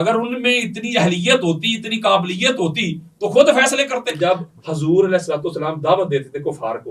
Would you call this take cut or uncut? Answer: cut